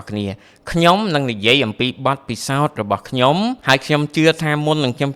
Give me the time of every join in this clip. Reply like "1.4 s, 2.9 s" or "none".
3.6 s